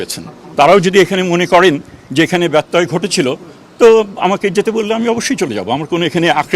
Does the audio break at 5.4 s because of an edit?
no; 0 cuts

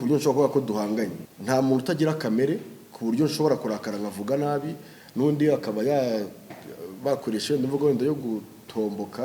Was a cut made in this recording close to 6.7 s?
no; 1 cut; at 1.2 s

